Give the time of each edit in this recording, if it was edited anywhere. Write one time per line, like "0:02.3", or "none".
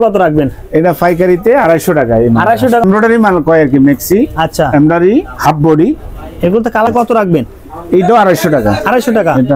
0:02.8
0:06.9

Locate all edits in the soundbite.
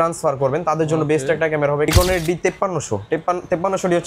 0:01.9

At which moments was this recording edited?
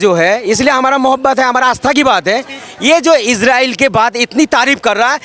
none

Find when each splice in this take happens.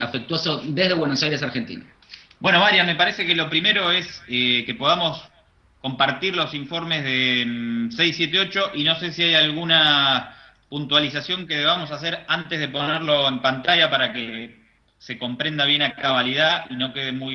0:05.3

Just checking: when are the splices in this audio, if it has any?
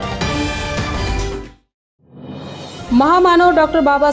0:02.6

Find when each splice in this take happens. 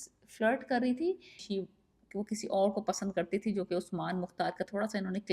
0:01.4

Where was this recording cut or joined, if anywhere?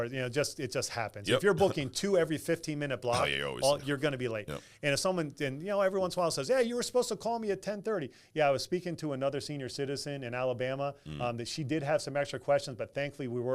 0:01.9

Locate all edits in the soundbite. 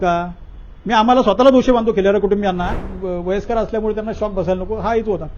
0:02.9

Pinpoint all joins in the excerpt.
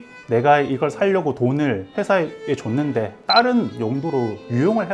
0:03.2

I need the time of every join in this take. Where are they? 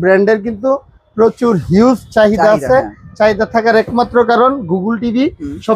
none

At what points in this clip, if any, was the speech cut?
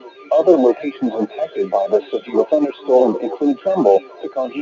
0:03.6

